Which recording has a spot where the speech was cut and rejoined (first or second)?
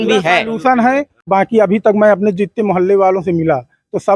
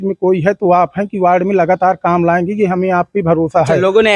first